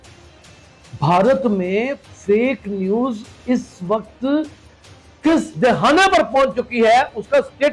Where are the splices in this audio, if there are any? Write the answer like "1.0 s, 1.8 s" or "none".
0.9 s